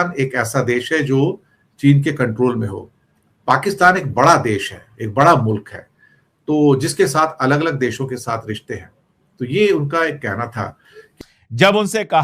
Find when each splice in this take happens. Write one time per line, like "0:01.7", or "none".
0:11.0